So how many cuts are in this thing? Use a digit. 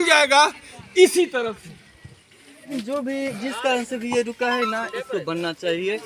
1